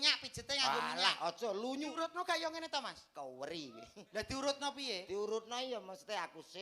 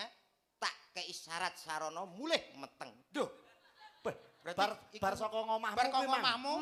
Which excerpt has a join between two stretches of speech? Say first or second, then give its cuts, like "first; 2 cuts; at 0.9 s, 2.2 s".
first; 1 cut; at 1.9 s